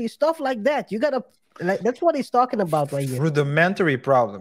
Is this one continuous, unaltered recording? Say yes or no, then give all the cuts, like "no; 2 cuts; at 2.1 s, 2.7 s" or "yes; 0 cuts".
no; 1 cut; at 3.2 s